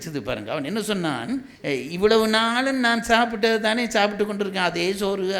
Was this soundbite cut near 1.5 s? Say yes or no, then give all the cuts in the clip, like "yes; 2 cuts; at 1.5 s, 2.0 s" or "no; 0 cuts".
yes; 1 cut; at 1.5 s